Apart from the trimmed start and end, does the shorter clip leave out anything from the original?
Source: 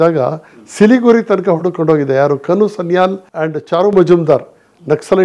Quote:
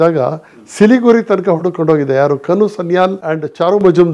yes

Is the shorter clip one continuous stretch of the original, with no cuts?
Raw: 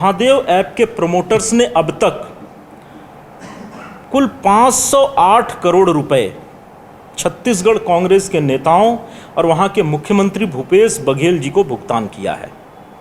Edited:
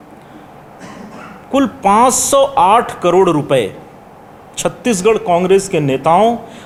yes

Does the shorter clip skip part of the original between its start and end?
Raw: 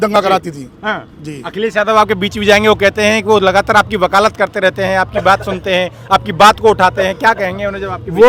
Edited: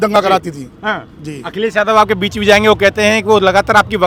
no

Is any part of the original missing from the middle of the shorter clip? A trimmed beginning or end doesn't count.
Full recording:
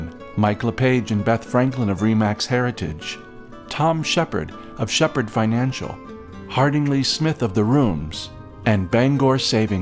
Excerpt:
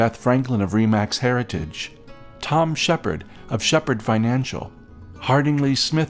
no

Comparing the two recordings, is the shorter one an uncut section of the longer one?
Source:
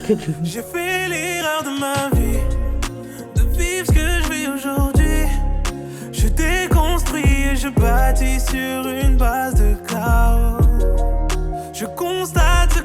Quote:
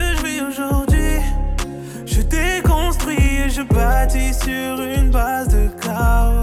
yes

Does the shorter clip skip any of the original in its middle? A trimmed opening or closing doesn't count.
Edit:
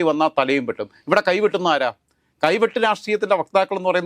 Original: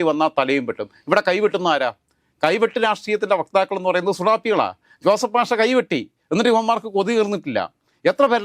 no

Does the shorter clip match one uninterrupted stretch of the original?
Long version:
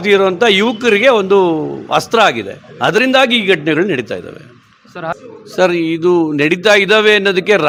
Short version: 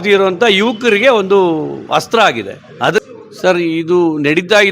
no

